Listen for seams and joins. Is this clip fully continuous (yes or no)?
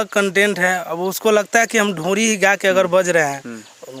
yes